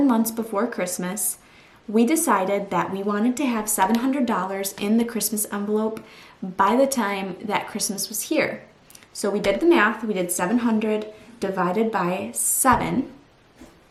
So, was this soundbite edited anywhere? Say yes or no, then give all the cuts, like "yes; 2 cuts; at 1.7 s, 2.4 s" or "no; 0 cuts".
no; 0 cuts